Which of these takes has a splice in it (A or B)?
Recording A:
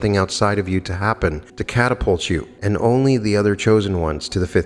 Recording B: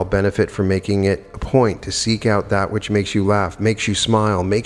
A